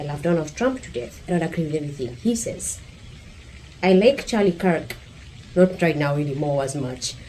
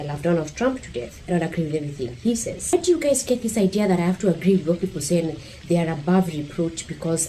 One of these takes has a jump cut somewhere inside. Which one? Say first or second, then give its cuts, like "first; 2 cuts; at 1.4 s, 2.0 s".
second; 1 cut; at 2.7 s